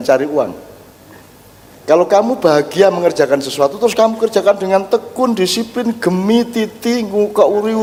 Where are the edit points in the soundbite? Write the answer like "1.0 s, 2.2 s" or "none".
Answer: none